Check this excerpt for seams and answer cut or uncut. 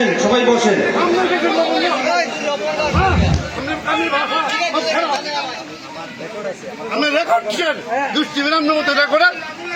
uncut